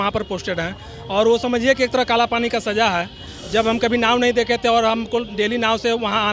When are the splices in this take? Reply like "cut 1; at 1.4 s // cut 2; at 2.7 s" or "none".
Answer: none

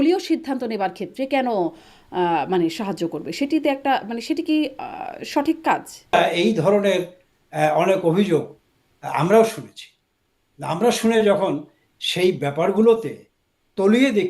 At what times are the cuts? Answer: cut 1; at 6.2 s

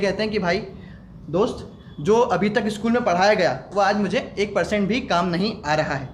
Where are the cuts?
none

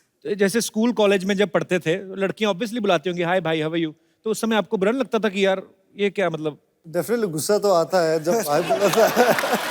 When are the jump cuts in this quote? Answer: cut 1; at 6.7 s

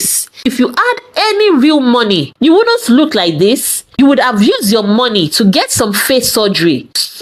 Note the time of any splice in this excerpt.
none

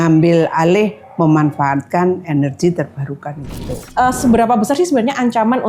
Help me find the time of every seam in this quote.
cut 1; at 3.7 s

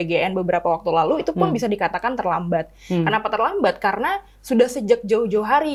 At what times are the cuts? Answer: none

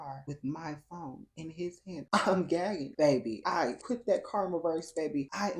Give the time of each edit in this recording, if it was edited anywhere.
cut 1; at 2.8 s

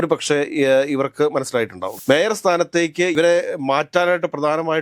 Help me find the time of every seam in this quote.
cut 1; at 1.9 s

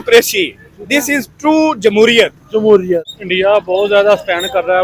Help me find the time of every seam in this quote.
cut 1; at 3.2 s

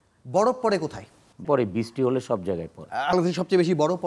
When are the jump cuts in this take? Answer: cut 1; at 1.4 s // cut 2; at 3.1 s

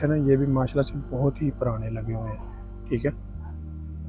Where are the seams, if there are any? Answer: none

